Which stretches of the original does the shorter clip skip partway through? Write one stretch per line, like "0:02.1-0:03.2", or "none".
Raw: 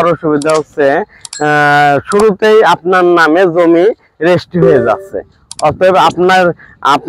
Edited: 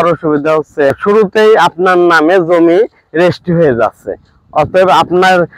0:00.9-0:02.0